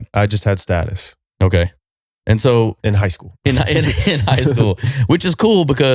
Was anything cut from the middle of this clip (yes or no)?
no